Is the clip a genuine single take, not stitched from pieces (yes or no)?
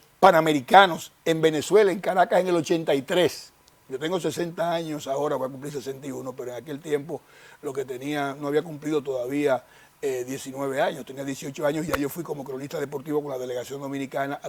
yes